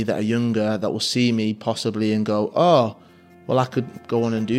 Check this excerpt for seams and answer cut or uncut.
uncut